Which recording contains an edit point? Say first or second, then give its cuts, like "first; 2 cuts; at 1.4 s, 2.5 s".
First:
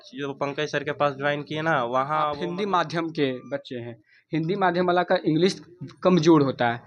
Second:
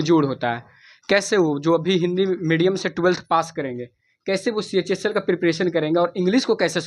first; 1 cut; at 2.4 s